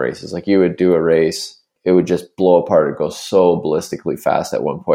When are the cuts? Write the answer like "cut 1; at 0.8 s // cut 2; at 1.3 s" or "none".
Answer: cut 1; at 1.7 s